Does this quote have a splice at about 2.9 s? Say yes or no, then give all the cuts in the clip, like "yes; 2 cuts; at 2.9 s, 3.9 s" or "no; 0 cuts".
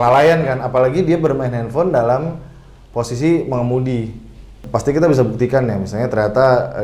no; 1 cut; at 4.6 s